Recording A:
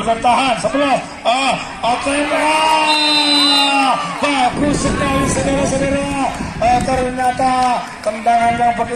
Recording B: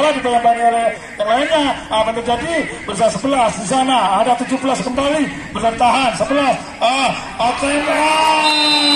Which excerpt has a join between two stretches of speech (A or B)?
A